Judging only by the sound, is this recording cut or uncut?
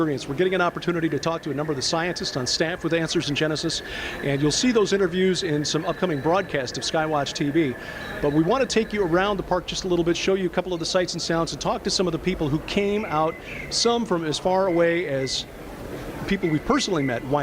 cut